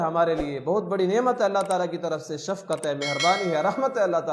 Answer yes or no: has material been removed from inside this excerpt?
no